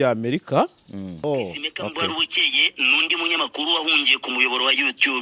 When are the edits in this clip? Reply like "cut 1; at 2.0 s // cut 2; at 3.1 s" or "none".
cut 1; at 1.2 s